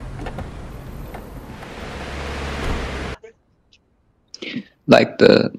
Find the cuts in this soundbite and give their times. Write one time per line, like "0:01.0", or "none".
0:03.2